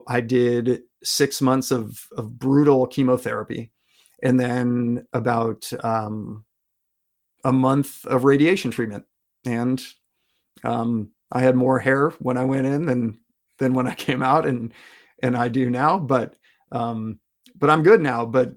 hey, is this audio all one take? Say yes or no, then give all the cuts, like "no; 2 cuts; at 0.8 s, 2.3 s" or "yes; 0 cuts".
yes; 0 cuts